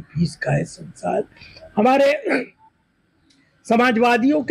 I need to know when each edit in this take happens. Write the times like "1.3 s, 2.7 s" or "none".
none